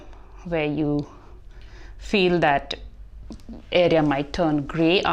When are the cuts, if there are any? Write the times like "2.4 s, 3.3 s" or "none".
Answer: none